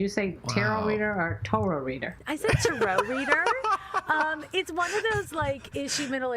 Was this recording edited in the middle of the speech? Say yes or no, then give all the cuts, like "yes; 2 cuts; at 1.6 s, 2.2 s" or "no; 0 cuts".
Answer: yes; 1 cut; at 2.1 s